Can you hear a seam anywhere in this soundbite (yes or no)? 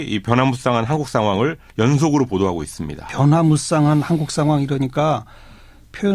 yes